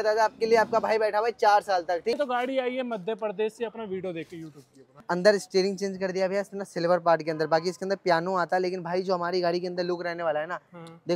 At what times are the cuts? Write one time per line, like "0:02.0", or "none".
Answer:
0:02.2
0:04.9